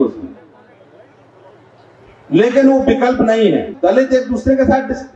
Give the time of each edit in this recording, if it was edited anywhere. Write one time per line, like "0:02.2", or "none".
0:03.7